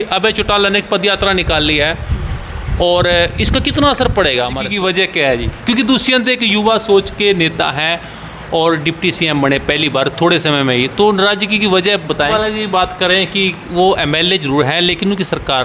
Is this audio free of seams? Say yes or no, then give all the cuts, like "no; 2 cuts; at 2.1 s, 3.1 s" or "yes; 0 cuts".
no; 2 cuts; at 4.6 s, 12.3 s